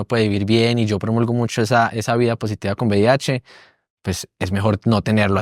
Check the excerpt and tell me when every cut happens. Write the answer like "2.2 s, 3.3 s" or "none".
none